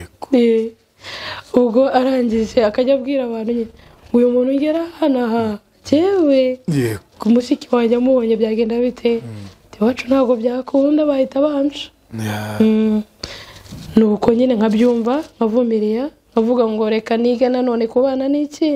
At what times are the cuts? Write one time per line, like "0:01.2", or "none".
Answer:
none